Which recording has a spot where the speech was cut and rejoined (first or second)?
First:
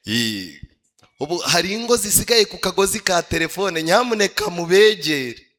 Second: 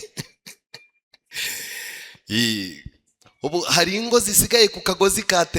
second